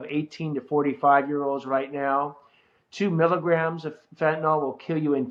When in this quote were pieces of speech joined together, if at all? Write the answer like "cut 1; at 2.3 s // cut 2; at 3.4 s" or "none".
none